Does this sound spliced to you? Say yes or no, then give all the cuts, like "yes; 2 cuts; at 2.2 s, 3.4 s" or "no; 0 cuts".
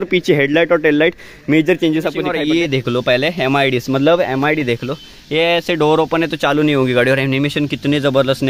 yes; 1 cut; at 2.3 s